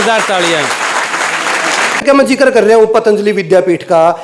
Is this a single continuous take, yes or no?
no